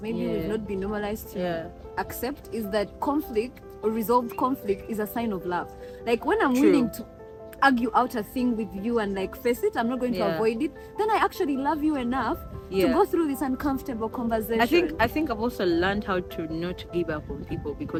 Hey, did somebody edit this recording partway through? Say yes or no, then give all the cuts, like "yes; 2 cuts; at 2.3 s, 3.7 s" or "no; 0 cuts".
no; 0 cuts